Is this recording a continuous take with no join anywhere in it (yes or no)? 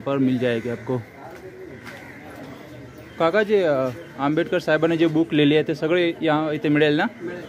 yes